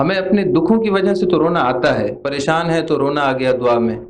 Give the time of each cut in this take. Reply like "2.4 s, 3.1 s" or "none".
2.2 s